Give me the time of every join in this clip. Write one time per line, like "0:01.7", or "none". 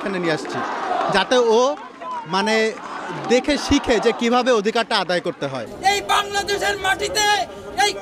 0:05.7